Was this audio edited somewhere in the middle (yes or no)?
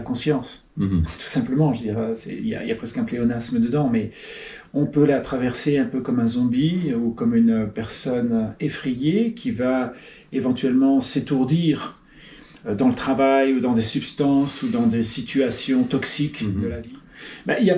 yes